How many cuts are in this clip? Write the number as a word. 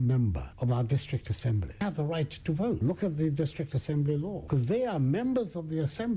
two